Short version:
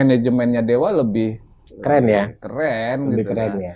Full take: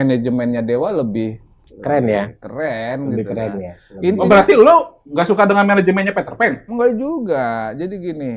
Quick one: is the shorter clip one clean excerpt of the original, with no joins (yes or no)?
yes